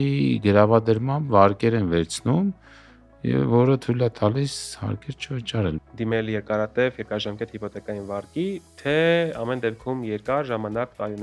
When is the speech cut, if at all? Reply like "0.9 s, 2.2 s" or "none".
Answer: 5.7 s

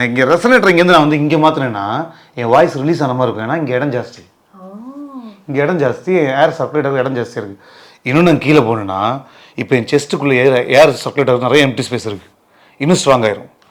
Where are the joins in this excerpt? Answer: none

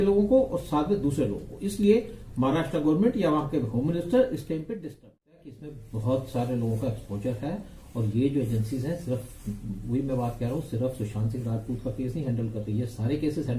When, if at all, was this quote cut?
5.5 s

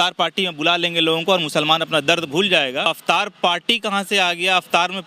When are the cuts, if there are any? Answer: 2.9 s

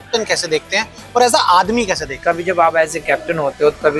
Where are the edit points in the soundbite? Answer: 2.1 s

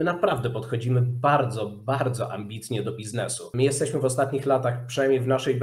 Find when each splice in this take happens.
3.4 s

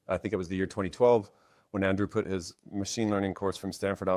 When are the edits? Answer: none

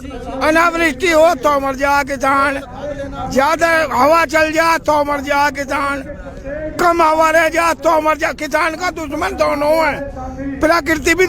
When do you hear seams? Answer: none

